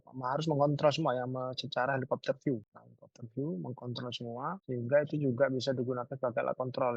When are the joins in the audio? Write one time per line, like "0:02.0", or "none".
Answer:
none

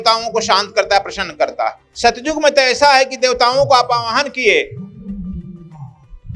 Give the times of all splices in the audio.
0:01.8

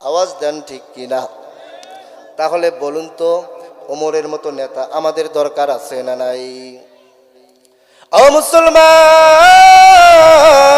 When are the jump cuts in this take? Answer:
none

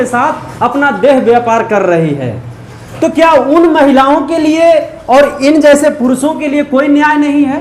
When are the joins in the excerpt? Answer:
none

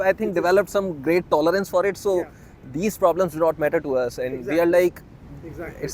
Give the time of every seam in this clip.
none

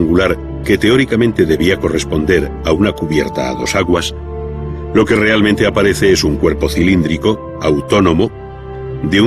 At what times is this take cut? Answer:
0:06.4

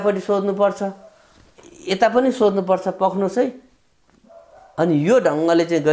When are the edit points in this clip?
none

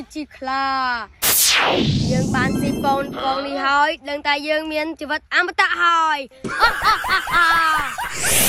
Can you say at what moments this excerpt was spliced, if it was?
none

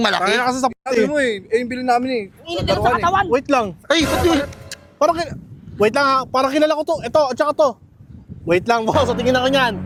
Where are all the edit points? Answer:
none

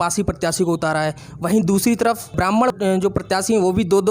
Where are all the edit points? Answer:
none

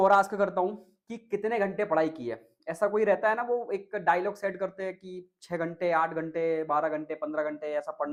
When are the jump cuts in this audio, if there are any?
none

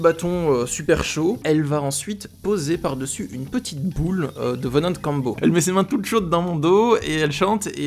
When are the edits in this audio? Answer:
0:01.4
0:05.4

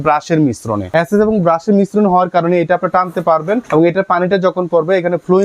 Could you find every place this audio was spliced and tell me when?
0:00.9
0:03.7

